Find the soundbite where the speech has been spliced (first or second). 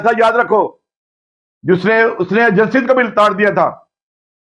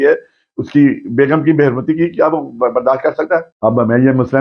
second